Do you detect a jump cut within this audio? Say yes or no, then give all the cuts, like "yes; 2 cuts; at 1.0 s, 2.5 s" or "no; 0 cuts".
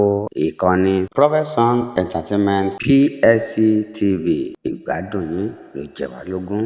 no; 0 cuts